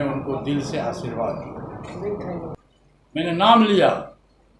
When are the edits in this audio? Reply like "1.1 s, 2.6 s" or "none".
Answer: 2.5 s